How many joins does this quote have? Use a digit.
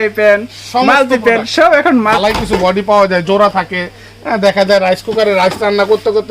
1